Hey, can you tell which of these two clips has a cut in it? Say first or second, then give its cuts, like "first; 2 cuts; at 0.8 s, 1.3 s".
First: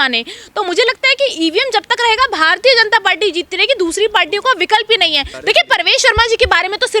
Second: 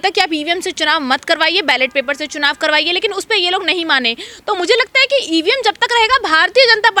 first; 1 cut; at 5.3 s